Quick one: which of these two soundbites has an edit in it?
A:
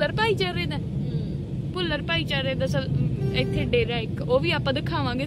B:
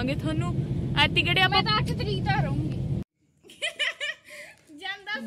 B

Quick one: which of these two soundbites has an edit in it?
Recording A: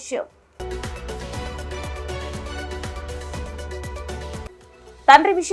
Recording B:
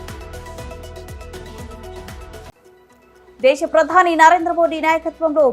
B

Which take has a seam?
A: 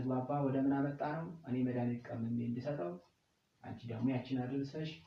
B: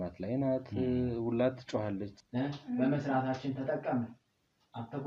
B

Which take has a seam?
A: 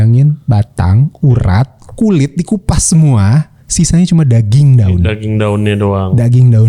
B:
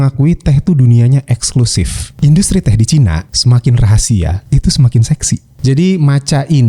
B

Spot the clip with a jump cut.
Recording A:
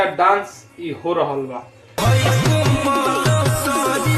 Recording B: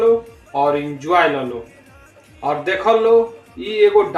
A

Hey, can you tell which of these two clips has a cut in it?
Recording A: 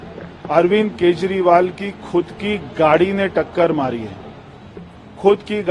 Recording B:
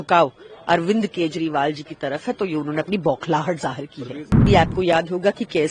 B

